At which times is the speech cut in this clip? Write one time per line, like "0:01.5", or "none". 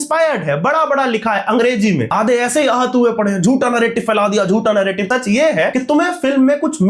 0:02.1
0:05.3

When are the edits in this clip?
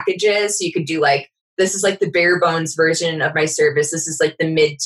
none

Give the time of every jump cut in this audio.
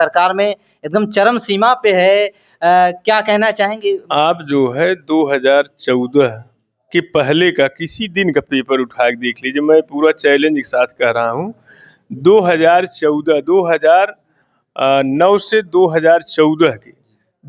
0:04.0

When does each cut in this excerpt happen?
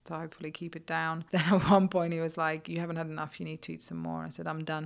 0:01.2

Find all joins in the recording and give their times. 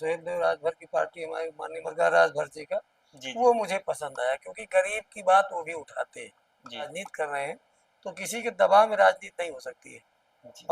0:01.9
0:06.9

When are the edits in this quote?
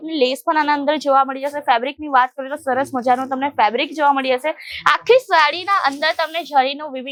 none

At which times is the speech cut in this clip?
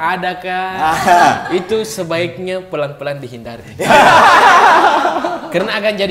none

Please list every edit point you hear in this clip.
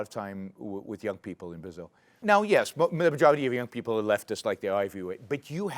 0:02.2

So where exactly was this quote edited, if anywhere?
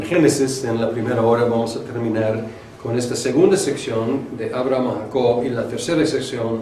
none

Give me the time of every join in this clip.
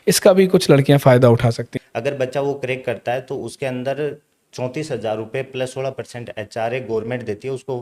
0:01.7

